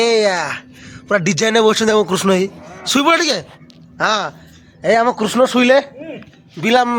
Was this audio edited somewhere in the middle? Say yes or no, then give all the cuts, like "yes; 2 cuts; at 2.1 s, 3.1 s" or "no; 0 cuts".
no; 0 cuts